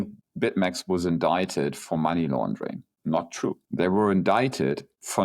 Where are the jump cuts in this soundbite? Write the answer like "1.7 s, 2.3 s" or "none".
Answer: 3.6 s